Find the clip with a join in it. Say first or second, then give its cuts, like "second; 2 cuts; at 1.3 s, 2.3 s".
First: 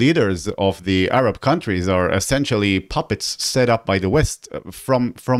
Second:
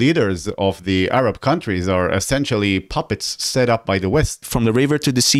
second; 1 cut; at 4.5 s